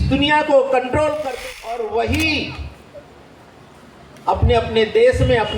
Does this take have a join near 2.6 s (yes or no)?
no